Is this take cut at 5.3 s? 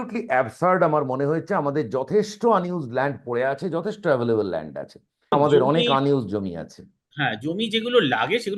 yes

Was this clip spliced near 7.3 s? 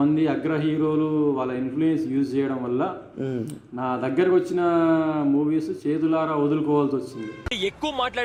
no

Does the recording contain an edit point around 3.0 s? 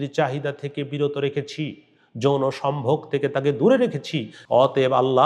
no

